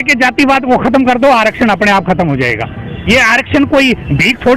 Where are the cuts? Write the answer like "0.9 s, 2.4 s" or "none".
3.0 s